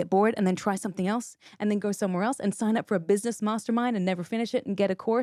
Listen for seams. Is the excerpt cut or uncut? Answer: uncut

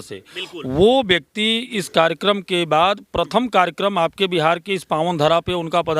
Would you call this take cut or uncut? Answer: uncut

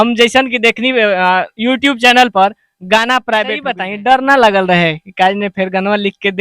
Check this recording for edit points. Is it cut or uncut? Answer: cut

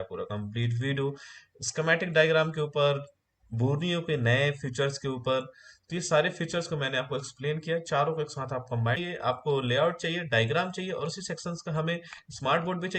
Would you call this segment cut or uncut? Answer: cut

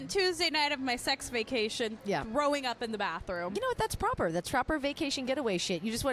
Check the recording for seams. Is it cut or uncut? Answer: uncut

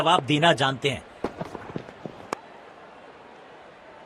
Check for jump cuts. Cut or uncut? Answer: cut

